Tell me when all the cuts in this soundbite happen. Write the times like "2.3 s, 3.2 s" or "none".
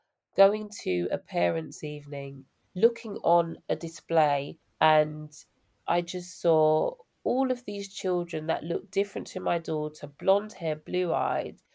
2.4 s, 4.6 s

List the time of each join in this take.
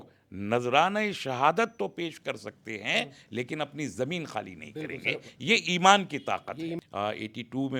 6.8 s

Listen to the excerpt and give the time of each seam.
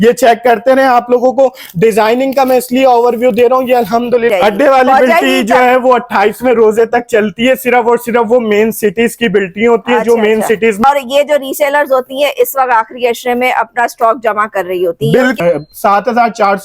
4.3 s, 10.8 s, 15.4 s

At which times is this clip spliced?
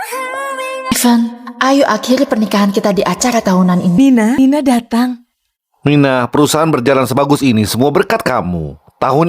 0.9 s, 4.2 s

